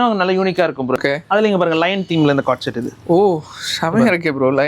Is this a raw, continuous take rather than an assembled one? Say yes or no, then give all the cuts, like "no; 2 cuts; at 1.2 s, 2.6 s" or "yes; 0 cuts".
no; 1 cut; at 1.0 s